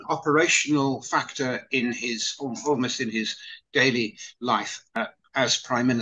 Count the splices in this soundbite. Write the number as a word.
one